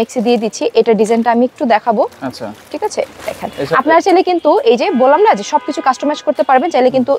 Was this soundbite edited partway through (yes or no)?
no